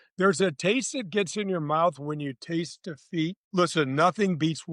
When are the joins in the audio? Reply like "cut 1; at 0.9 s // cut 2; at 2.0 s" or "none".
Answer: cut 1; at 3.4 s